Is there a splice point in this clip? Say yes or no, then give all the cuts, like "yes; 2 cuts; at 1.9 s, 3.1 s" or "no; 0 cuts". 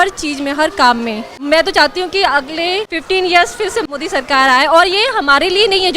yes; 3 cuts; at 1.3 s, 2.9 s, 3.8 s